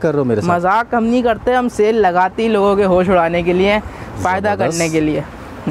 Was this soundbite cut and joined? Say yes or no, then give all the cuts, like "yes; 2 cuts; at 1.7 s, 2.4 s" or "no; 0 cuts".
no; 0 cuts